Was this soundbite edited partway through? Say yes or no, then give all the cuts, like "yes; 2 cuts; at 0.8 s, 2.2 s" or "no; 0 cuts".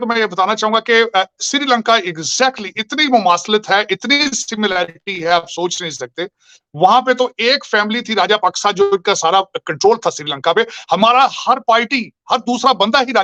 no; 0 cuts